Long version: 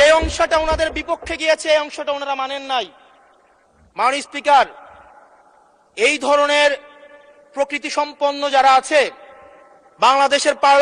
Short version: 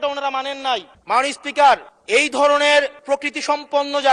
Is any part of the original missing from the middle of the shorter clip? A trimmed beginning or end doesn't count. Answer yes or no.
yes